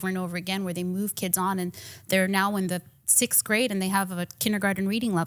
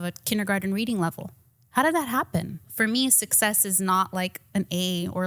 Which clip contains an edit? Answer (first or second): second